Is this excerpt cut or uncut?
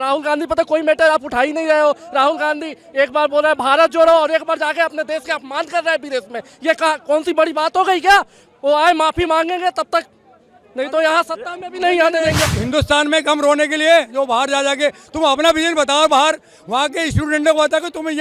cut